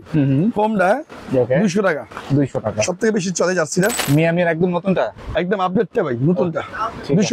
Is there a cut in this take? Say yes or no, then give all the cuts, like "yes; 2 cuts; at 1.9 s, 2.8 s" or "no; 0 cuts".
yes; 1 cut; at 4.0 s